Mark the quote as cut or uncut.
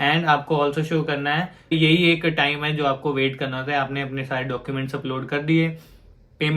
cut